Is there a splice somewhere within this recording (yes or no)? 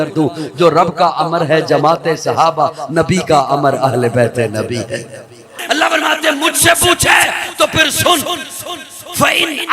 yes